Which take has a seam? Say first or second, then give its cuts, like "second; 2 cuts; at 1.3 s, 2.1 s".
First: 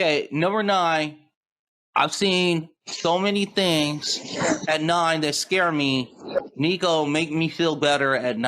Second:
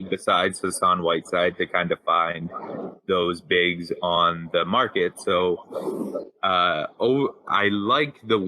first; 1 cut; at 7.1 s